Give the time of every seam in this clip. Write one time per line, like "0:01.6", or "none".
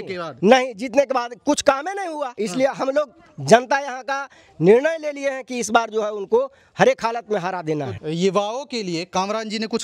0:02.3
0:07.9